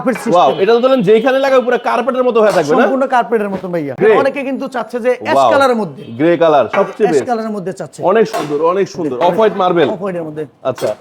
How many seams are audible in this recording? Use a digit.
2